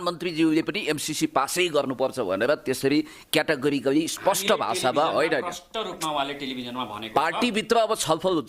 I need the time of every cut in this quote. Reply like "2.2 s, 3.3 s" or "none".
none